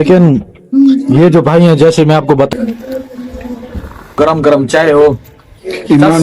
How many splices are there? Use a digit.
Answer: 2